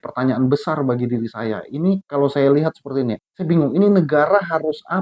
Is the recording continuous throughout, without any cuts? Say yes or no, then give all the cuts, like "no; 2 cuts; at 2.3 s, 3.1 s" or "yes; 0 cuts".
no; 1 cut; at 3.3 s